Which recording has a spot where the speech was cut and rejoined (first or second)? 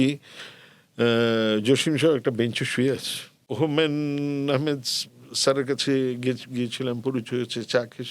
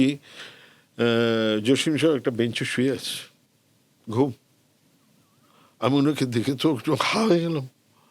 first